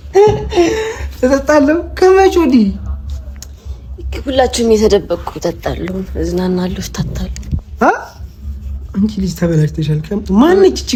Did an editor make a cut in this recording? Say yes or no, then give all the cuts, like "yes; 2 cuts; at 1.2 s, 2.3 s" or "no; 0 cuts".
no; 0 cuts